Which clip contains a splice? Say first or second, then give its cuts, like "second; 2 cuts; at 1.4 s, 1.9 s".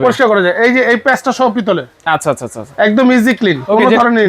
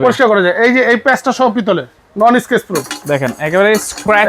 second; 1 cut; at 1.9 s